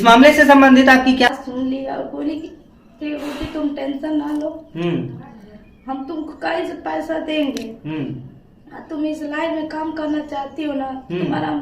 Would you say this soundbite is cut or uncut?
cut